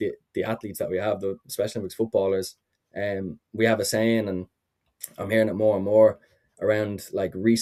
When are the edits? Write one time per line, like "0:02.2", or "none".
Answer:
none